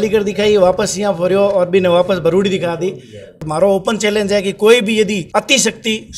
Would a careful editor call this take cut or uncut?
cut